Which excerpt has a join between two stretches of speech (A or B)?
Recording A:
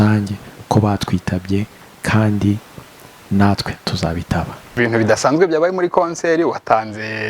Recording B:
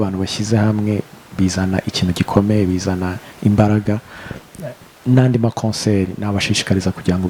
A